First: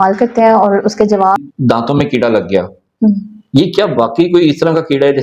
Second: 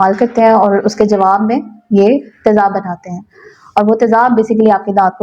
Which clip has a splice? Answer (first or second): first